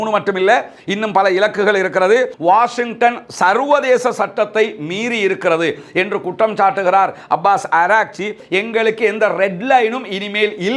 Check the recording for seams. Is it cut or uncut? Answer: cut